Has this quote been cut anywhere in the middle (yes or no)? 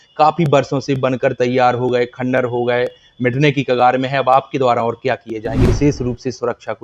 yes